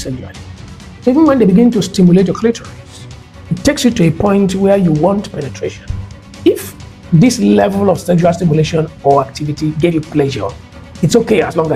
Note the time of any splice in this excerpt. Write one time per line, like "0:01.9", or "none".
0:06.2